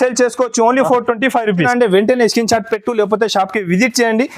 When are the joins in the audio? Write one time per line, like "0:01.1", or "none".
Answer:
0:01.7